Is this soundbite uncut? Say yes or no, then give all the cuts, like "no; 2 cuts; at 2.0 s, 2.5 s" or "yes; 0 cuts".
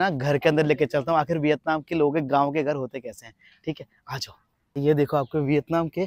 yes; 0 cuts